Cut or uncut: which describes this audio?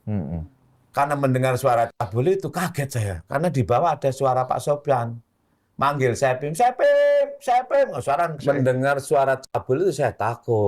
cut